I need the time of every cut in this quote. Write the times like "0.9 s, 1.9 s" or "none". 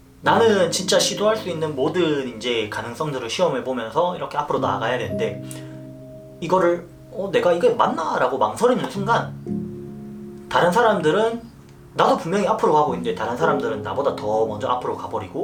none